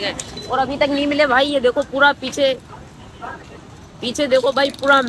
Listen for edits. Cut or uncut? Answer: uncut